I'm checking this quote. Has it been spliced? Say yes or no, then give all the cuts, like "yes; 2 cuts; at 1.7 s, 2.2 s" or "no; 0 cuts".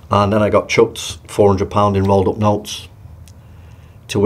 no; 0 cuts